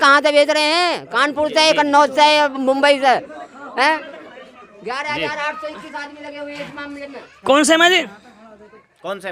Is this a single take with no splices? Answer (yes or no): yes